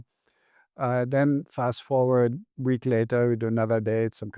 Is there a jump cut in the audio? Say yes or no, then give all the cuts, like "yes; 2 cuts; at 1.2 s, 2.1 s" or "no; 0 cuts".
yes; 1 cut; at 2.5 s